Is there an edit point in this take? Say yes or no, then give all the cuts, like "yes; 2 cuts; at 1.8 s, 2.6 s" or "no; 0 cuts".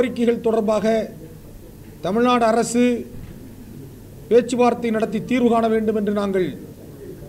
no; 0 cuts